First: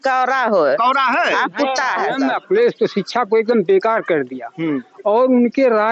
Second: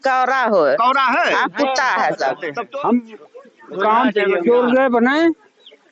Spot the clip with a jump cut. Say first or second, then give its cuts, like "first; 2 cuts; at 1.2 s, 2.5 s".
first; 1 cut; at 2.1 s